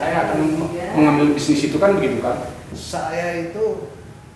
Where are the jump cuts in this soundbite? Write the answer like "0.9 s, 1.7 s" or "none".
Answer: 2.7 s